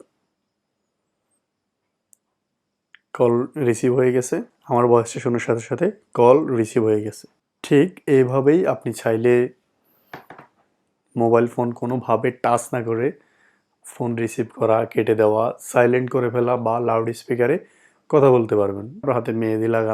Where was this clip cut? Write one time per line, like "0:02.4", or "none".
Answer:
0:04.5
0:19.0